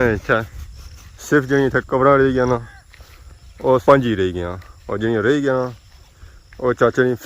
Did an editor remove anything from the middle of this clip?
yes; 1 cut; at 3.8 s

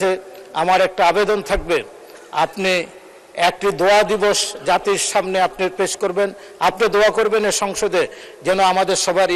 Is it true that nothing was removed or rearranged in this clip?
yes; 0 cuts

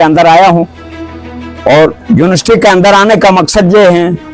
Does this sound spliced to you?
no; 0 cuts

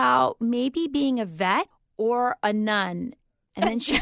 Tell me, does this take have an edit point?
yes; 1 cut; at 1.8 s

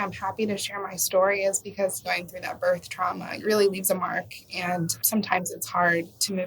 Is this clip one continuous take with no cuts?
no; 3 cuts; at 2.0 s, 3.3 s, 5.0 s

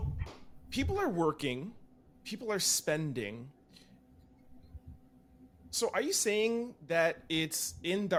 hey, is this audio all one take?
yes; 0 cuts

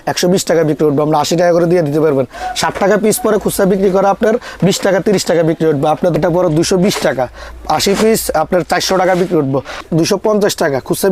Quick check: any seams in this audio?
yes; 3 cuts; at 2.4 s, 6.1 s, 9.8 s

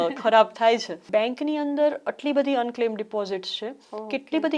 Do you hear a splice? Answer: yes; 1 cut; at 0.9 s

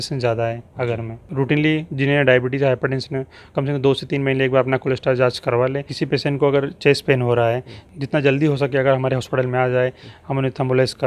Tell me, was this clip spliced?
yes; 3 cuts; at 1.3 s, 5.9 s, 7.8 s

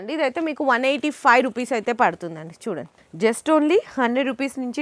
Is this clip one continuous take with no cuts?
no; 1 cut; at 3.0 s

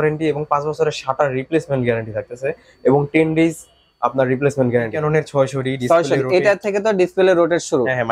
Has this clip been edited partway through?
yes; 1 cut; at 4.9 s

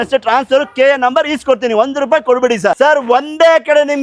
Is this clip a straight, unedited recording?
no; 1 cut; at 2.7 s

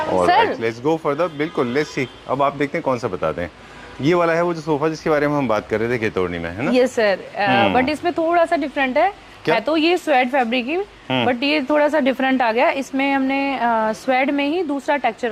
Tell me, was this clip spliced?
no; 0 cuts

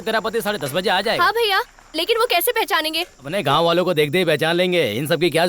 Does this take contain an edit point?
yes; 1 cut; at 3.3 s

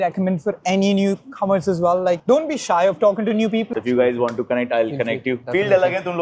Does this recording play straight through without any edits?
no; 2 cuts; at 3.7 s, 5.4 s

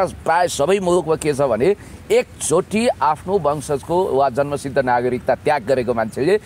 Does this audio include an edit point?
no; 0 cuts

